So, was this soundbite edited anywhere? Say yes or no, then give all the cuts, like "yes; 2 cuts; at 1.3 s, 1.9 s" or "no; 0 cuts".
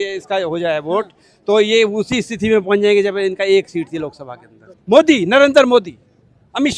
yes; 1 cut; at 4.8 s